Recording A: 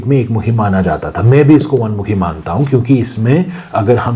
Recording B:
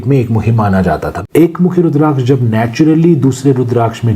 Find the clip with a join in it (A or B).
B